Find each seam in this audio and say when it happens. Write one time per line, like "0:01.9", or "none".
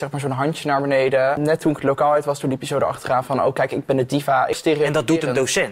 0:01.4
0:04.6